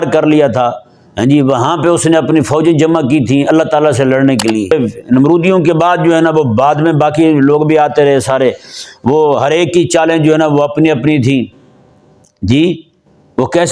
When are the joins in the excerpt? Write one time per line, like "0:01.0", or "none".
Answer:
0:04.7